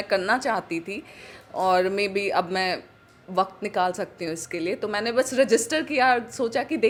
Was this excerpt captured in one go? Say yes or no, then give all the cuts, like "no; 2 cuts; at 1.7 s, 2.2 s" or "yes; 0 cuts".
yes; 0 cuts